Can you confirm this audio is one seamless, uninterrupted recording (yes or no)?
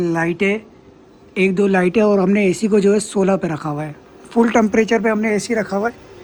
yes